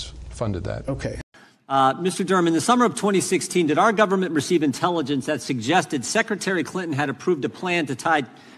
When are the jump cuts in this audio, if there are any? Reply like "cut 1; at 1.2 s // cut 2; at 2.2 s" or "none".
cut 1; at 1.0 s